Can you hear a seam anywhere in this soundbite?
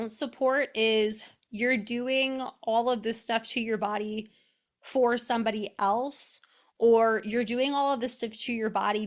no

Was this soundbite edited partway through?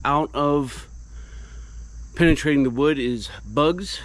no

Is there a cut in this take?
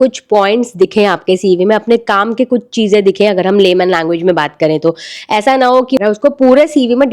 yes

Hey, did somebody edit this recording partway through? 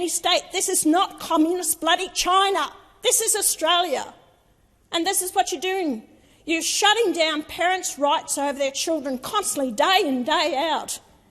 no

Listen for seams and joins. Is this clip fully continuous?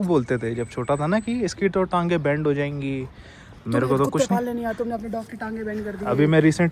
yes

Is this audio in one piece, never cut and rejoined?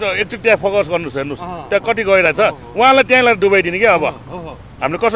yes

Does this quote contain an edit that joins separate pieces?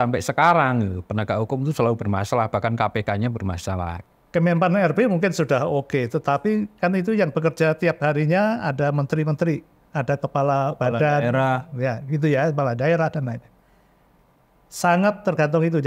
yes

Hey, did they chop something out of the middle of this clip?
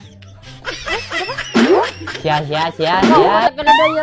yes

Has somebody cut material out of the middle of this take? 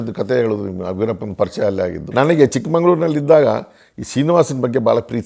yes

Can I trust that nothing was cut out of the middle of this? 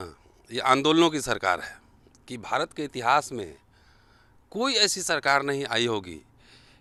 yes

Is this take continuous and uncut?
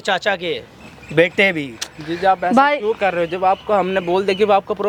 yes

